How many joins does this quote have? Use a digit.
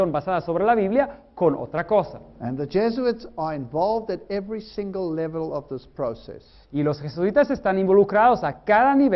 1